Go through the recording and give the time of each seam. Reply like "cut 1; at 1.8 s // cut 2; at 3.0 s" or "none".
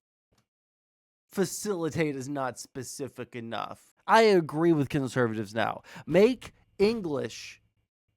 cut 1; at 3.9 s

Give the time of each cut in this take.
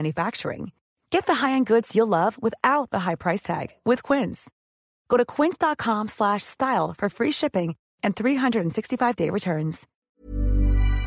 cut 1; at 9.9 s

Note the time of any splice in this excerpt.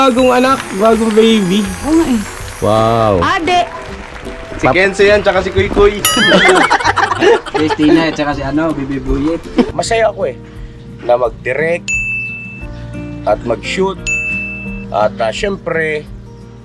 cut 1; at 9.7 s

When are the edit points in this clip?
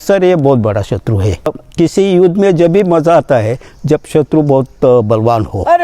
cut 1; at 1.6 s

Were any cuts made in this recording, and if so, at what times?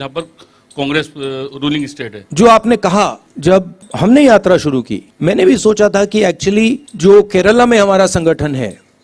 cut 1; at 2.2 s // cut 2; at 3.5 s // cut 3; at 5.0 s // cut 4; at 6.9 s

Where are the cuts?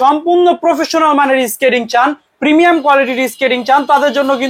none

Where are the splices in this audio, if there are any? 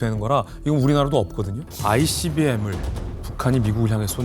cut 1; at 1.6 s

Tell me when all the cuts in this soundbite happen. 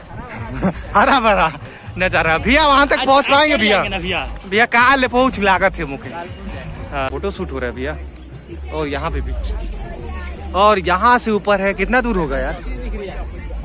cut 1; at 7.1 s

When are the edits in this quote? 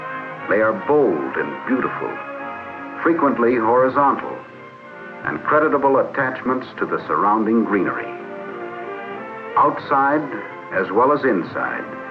cut 1; at 1.0 s

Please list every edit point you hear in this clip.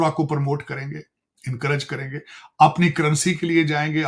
none

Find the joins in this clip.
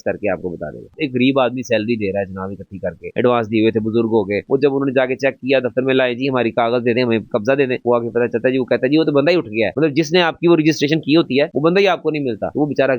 cut 1; at 0.9 s // cut 2; at 9.7 s

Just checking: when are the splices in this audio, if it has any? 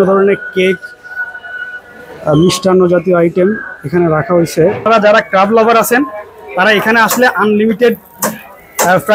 cut 1; at 4.8 s

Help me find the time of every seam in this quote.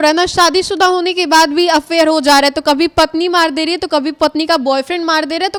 none

